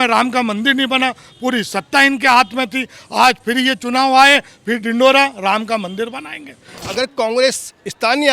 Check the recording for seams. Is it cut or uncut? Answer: cut